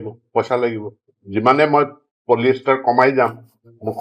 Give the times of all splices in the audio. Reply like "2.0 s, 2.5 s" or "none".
none